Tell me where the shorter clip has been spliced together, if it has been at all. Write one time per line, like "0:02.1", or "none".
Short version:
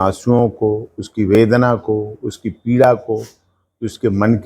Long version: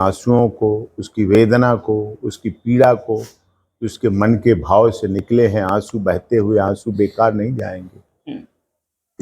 none